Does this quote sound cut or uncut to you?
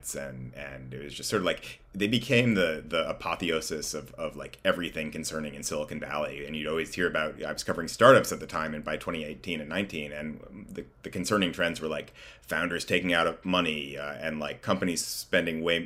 uncut